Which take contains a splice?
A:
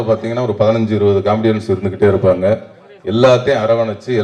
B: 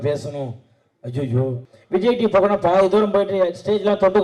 B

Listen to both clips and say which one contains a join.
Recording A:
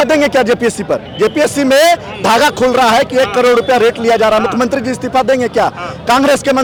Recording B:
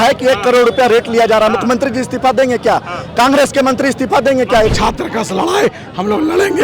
B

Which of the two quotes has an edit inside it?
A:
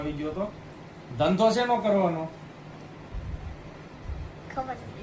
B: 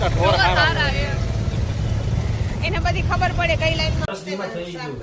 B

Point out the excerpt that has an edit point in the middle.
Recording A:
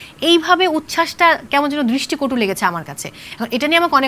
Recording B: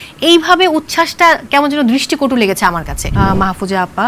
B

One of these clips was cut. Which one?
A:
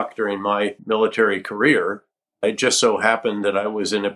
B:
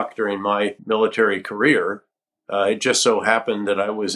A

